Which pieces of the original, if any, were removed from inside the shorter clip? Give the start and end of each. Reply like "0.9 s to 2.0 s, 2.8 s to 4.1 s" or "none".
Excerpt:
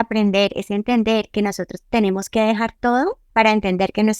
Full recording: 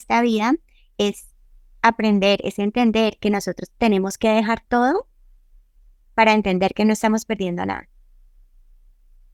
5.1 s to 6.0 s